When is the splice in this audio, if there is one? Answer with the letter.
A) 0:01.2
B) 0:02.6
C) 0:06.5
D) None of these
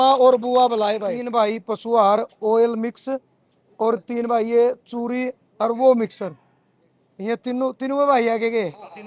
A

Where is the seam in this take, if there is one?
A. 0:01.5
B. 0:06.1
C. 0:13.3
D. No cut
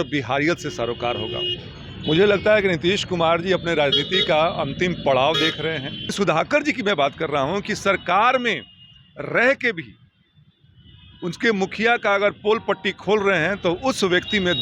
B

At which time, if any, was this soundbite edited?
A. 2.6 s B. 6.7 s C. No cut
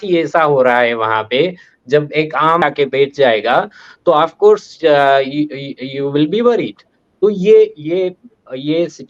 A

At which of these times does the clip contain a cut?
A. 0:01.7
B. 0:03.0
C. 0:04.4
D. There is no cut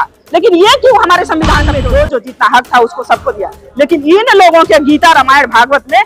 A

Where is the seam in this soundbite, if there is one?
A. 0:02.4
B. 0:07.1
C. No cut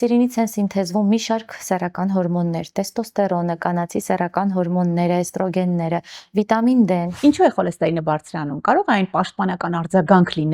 B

